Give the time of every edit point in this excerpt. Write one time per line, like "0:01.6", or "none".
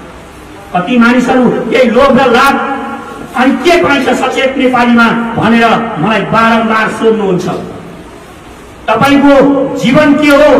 none